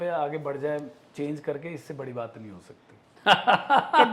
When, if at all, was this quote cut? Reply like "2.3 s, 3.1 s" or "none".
3.0 s